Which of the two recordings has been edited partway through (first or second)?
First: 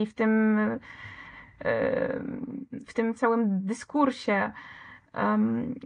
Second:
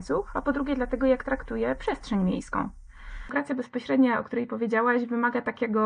second